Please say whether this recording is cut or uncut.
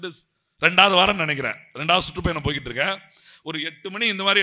uncut